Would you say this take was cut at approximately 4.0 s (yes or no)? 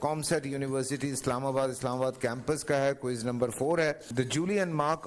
yes